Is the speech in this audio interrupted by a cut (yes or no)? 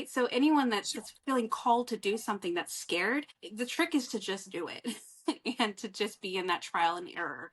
yes